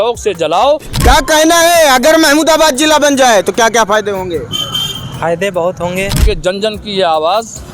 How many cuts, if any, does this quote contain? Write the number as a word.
two